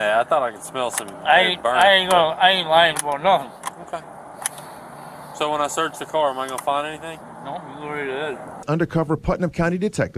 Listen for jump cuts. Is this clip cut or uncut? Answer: cut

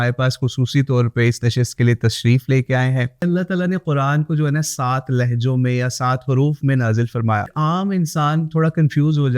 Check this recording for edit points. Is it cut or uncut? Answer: cut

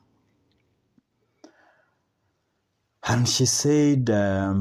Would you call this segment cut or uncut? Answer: uncut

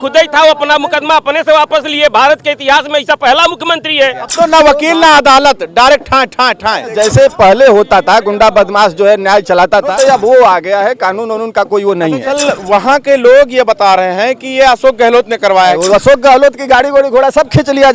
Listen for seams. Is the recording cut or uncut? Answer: cut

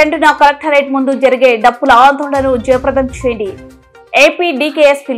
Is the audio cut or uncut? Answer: uncut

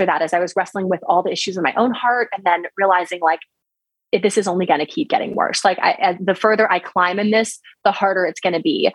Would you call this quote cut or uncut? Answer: uncut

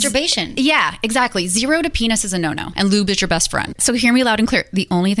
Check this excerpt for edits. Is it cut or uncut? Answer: cut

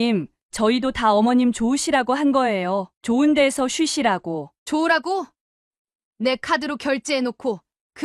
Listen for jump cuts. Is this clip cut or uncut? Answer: uncut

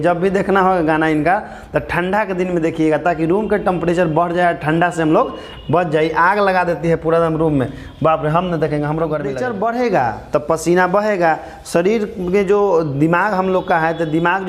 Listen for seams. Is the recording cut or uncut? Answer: cut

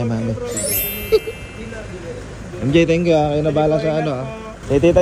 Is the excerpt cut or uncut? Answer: uncut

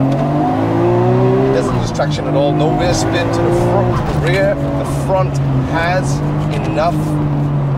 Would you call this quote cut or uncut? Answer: uncut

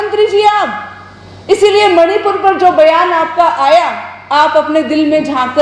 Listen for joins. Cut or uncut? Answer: uncut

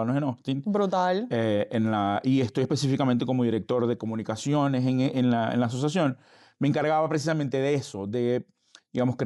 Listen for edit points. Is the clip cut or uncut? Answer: uncut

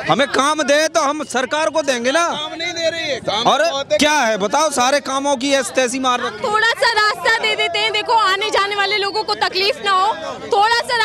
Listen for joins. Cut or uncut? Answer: uncut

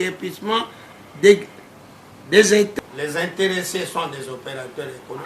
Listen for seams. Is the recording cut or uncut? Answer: cut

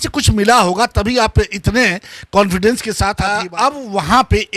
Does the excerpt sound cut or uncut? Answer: cut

